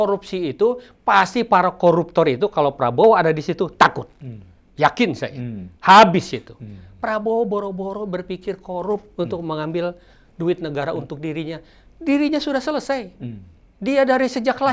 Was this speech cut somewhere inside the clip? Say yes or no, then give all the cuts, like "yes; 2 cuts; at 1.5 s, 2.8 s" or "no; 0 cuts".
no; 0 cuts